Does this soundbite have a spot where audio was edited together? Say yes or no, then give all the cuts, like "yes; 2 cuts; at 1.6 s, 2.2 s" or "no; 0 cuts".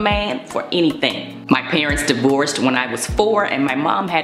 no; 0 cuts